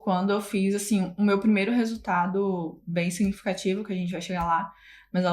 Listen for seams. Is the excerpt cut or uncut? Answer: uncut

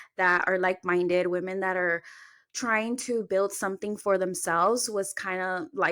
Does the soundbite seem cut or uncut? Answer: uncut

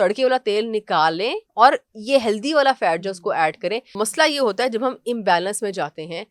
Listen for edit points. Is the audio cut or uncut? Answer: cut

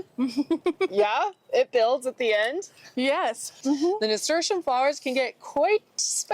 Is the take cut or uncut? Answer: cut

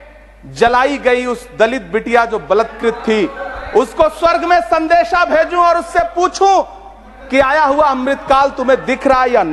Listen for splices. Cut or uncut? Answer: uncut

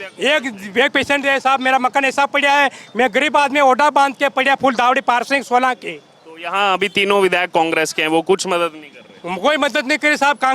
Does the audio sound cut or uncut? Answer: uncut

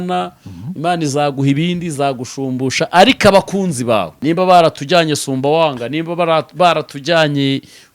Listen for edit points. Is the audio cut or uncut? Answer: cut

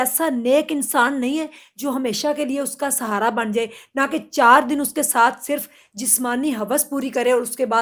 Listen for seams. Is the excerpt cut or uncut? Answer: uncut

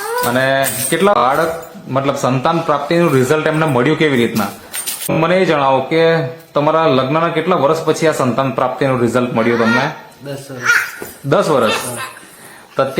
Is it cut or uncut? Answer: cut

